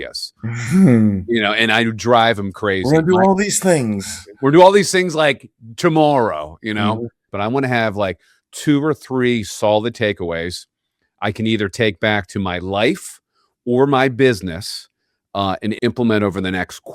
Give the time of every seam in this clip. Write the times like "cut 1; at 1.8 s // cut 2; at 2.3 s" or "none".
cut 1; at 7.3 s // cut 2; at 15.8 s